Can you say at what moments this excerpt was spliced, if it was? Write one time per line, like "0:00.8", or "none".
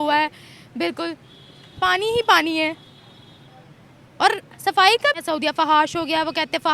0:05.2